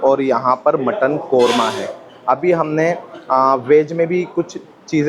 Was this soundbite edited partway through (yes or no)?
no